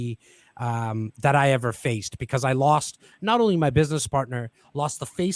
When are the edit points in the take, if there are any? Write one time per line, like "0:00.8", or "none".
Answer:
none